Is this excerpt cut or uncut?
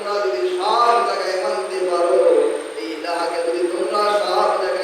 uncut